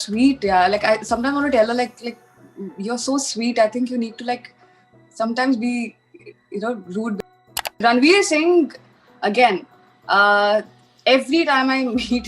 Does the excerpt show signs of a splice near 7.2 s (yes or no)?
yes